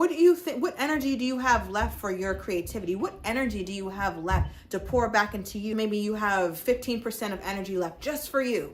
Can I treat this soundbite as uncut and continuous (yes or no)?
no